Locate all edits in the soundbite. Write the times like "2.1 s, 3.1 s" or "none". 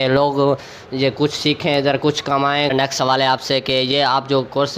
2.7 s